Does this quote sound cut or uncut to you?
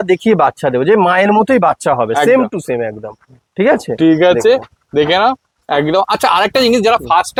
uncut